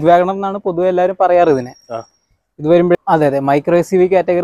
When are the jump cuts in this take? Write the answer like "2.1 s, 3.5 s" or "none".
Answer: 2.9 s